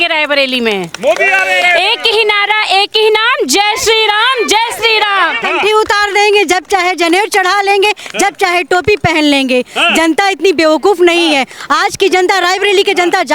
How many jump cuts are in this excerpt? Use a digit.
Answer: 1